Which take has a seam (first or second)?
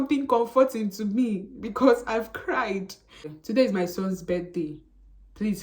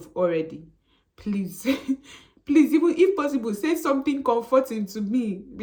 first